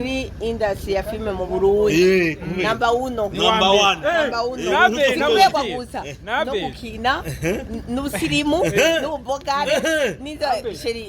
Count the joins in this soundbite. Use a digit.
1